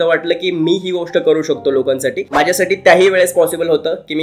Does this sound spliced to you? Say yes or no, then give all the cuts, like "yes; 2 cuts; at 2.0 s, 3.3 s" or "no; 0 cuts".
yes; 1 cut; at 2.2 s